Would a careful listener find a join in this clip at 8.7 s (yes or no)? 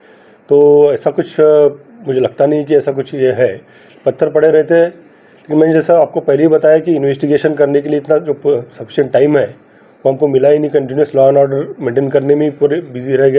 no